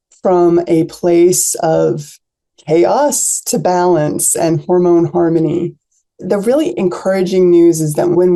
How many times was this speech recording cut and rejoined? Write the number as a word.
zero